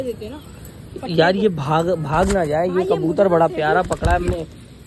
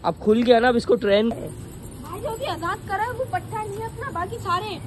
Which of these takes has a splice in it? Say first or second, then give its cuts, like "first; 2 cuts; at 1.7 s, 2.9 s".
second; 1 cut; at 1.3 s